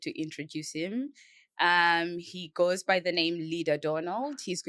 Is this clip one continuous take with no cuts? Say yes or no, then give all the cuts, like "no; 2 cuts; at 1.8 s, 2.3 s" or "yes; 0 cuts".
yes; 0 cuts